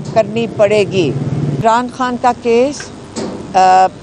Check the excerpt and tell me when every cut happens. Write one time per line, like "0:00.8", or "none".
0:01.6